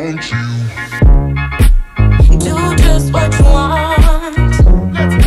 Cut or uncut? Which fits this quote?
uncut